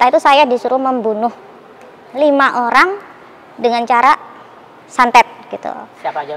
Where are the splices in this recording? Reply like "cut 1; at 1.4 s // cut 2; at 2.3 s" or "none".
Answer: none